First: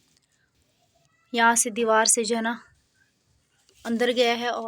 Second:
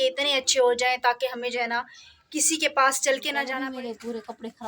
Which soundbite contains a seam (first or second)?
second